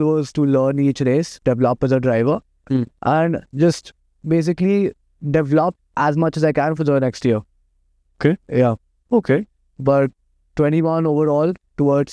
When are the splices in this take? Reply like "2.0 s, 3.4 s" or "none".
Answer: none